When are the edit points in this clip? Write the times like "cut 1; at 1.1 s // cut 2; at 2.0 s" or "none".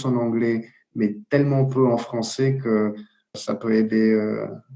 cut 1; at 3.3 s